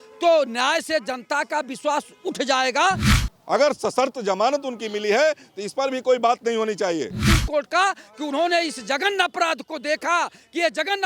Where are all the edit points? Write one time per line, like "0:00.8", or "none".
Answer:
0:03.1
0:07.2

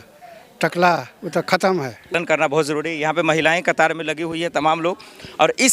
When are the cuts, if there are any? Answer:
0:02.2

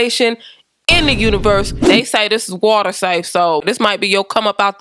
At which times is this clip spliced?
0:02.1

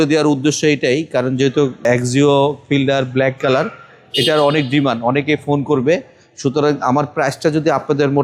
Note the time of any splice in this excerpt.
none

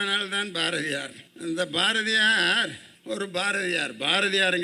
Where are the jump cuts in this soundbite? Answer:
0:01.2
0:02.9

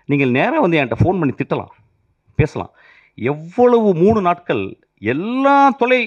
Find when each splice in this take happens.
none

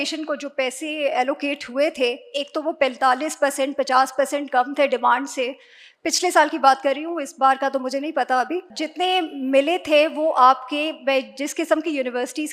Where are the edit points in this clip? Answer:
0:08.8

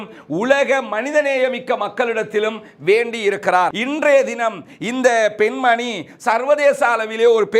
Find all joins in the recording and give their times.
0:03.7

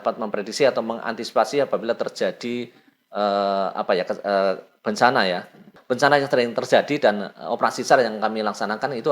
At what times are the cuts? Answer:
0:05.7

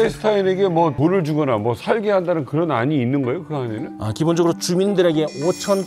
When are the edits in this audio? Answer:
0:00.9

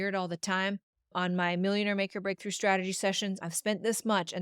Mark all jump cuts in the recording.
0:01.1

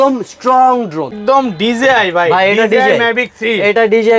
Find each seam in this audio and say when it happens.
0:01.2

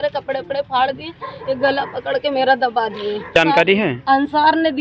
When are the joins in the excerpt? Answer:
0:03.4

